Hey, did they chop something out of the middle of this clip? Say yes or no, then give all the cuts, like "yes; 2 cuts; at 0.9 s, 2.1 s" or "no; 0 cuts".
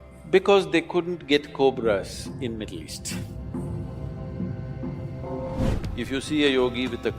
yes; 1 cut; at 5.7 s